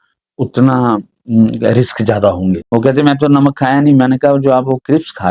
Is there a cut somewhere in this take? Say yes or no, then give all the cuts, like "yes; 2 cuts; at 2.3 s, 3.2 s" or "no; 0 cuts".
yes; 1 cut; at 2.6 s